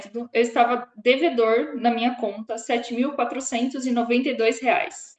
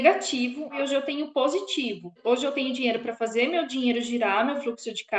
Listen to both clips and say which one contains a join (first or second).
second